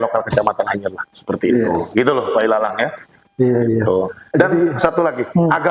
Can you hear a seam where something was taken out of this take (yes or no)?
no